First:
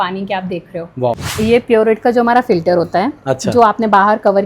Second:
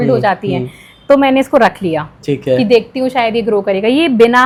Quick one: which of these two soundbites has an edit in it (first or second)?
first